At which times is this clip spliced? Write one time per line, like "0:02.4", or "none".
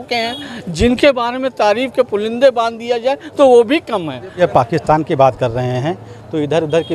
0:04.4